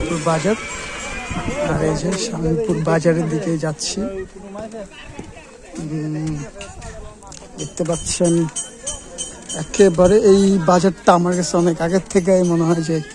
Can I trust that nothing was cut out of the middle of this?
yes; 0 cuts

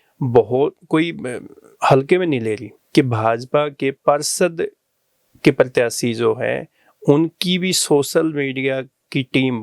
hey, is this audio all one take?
no; 1 cut; at 2.7 s

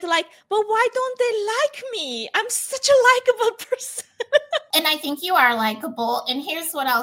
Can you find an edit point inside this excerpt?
yes; 1 cut; at 4.7 s

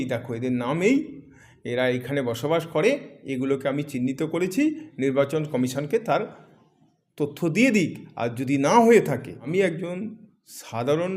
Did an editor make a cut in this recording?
yes; 1 cut; at 9.4 s

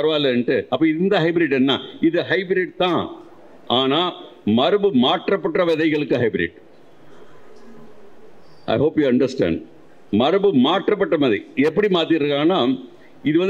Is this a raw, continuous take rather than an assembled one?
yes; 0 cuts

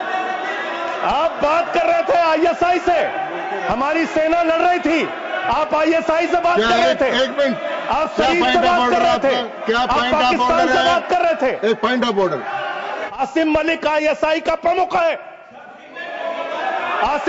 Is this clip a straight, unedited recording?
no; 1 cut; at 13.1 s

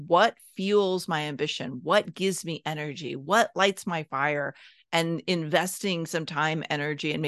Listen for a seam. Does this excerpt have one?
no; 0 cuts

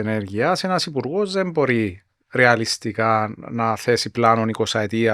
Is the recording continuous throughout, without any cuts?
yes; 0 cuts

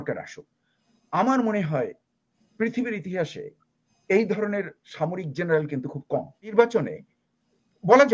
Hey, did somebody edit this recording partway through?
yes; 1 cut; at 6.5 s

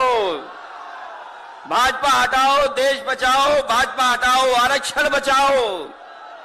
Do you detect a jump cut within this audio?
no; 0 cuts

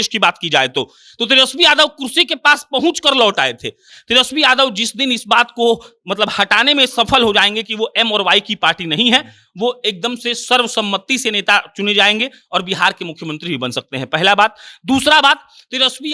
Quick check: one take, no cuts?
no; 1 cut; at 3.9 s

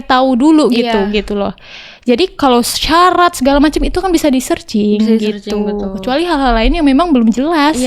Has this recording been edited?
no; 0 cuts

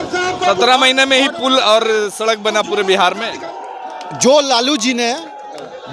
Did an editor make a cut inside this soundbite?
no; 0 cuts

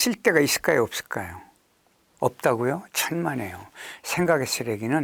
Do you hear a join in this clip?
no; 0 cuts

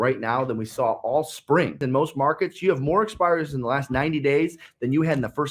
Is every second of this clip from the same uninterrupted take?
no; 1 cut; at 1.8 s

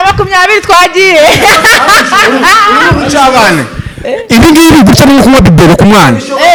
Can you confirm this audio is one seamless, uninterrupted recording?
yes; 0 cuts

